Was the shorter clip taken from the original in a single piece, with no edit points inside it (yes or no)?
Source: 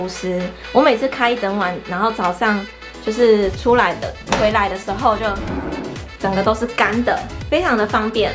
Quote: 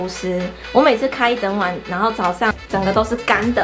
no